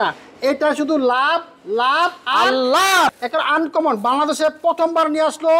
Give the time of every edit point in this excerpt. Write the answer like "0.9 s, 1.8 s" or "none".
3.1 s